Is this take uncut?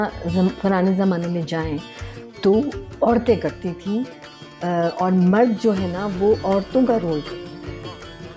yes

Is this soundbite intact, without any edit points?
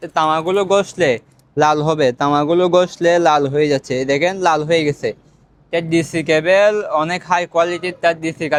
yes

